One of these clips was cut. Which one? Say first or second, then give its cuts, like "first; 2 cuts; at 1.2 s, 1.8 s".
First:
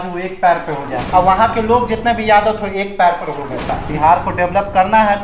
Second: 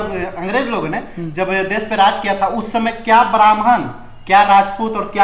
first; 2 cuts; at 1.0 s, 3.8 s